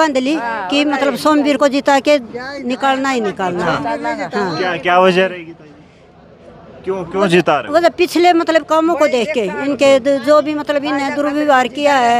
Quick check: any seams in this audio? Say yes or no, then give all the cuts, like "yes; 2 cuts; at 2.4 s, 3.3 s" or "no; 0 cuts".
no; 0 cuts